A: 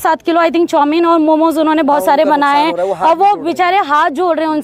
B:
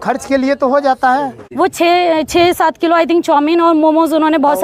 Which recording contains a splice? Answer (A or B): B